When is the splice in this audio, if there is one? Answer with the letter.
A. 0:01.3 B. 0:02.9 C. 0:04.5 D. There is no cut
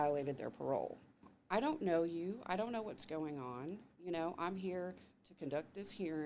A